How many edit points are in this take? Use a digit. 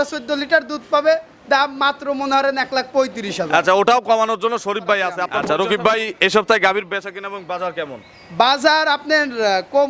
1